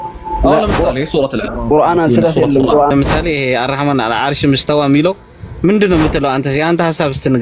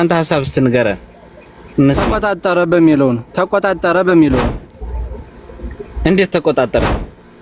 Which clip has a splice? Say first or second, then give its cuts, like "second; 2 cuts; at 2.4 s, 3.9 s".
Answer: first; 1 cut; at 2.9 s